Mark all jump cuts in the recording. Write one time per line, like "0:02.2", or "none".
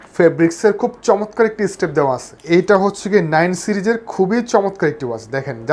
0:02.3

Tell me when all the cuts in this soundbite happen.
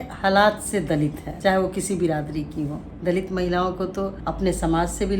0:01.3
0:02.9
0:04.2

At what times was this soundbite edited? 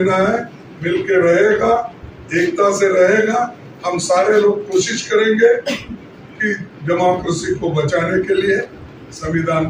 none

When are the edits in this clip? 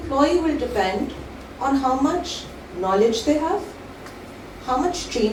none

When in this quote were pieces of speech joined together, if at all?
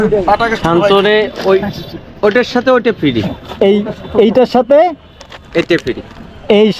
none

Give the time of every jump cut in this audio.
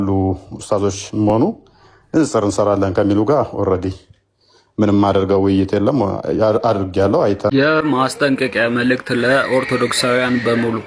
0:07.5

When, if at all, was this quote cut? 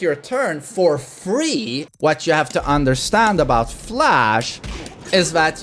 0:01.8

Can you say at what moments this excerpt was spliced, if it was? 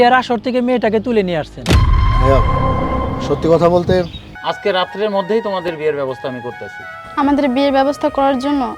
0:04.2

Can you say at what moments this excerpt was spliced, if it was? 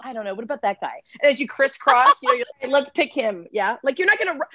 0:02.5

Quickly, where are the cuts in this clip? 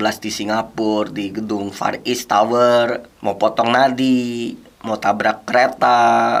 none

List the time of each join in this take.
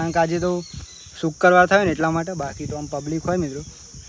none

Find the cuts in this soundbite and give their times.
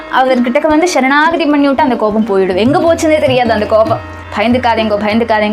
0:04.3

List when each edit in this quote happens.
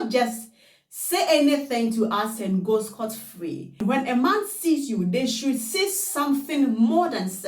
0:03.8

